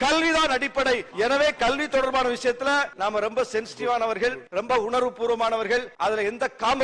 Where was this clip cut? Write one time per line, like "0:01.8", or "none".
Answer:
0:01.1
0:02.9
0:04.4
0:05.9

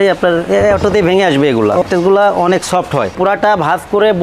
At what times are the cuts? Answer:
0:01.8
0:03.1

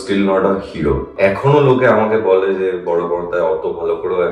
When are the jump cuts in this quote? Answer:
0:01.1

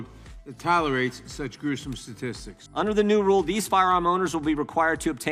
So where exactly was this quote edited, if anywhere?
0:02.6

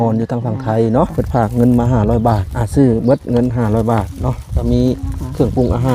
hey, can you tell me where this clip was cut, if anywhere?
0:01.1
0:02.5

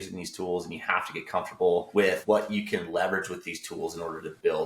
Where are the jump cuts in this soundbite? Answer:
0:02.1

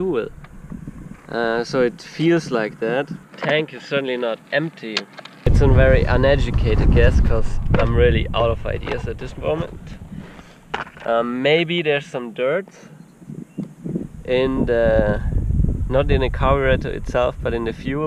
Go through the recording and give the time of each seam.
0:03.2
0:05.6

